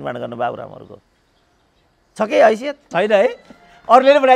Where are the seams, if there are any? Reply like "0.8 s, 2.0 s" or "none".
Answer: 2.8 s

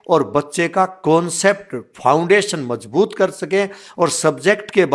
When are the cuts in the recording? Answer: none

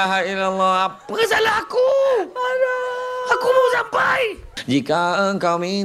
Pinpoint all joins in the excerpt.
4.5 s

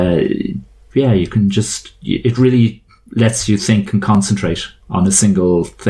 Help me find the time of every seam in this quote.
none

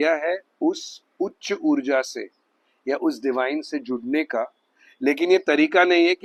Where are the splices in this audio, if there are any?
none

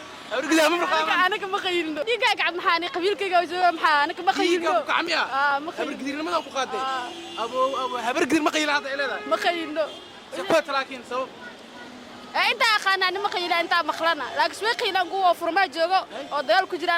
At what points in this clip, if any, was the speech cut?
2.0 s

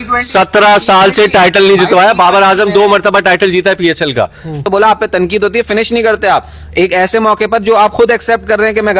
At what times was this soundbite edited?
4.6 s

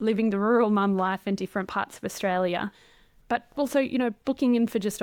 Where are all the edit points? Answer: none

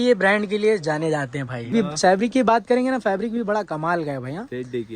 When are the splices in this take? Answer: 1.7 s

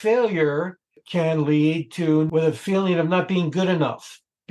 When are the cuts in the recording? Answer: 1.0 s, 2.3 s

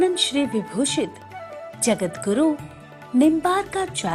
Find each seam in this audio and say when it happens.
none

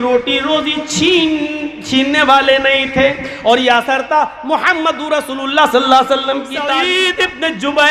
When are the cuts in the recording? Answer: 6.7 s

